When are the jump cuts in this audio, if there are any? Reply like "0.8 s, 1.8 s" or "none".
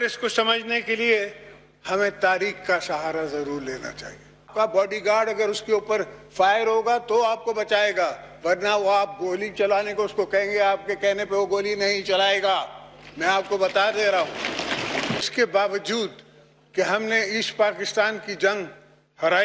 4.4 s, 15.2 s